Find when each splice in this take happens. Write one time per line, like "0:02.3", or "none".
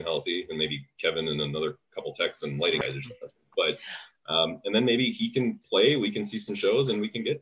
0:02.8